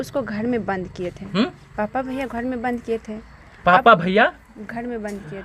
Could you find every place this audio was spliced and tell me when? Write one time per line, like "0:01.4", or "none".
none